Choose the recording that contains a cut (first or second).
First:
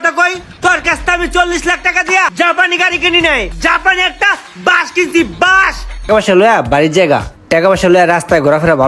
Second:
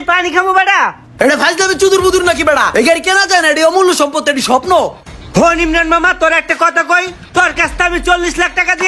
first